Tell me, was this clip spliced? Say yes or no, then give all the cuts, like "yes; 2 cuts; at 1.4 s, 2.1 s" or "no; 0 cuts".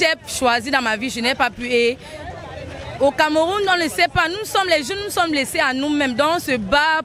no; 0 cuts